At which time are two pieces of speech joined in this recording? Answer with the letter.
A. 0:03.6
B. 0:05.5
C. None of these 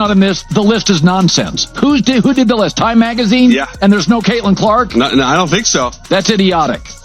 A